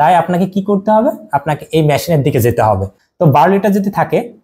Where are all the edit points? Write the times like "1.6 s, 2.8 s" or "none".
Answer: 3.0 s